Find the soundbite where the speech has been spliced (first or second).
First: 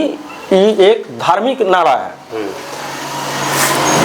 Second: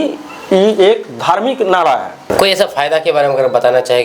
second